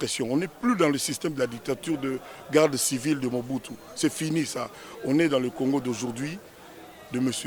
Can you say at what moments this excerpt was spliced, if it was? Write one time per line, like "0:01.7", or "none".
none